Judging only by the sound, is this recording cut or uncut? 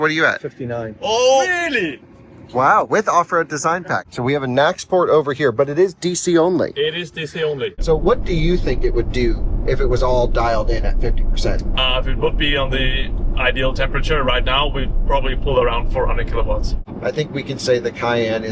cut